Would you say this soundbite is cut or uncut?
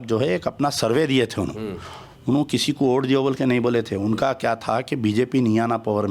uncut